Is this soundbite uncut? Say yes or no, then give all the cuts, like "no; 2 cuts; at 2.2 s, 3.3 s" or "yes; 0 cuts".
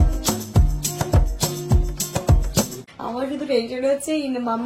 no; 1 cut; at 2.7 s